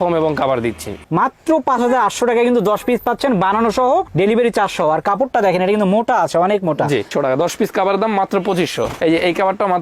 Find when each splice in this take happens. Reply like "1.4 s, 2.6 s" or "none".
1.0 s, 7.1 s

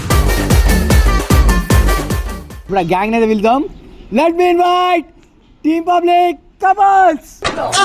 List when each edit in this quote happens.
2.7 s

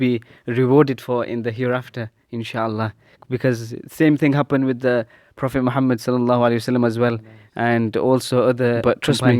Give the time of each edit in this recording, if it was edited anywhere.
none

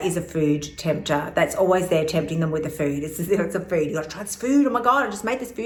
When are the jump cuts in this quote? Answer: none

